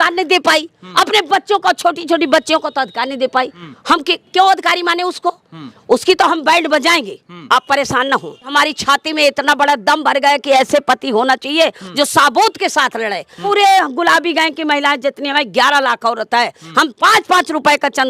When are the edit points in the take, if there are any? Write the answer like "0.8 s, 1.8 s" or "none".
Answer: 3.6 s, 8.5 s, 13.4 s